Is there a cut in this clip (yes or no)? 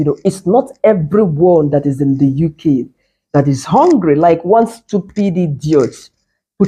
no